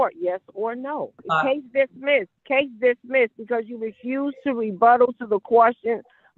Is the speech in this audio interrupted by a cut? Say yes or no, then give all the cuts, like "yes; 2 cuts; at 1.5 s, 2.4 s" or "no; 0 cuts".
yes; 2 cuts; at 1.2 s, 2.4 s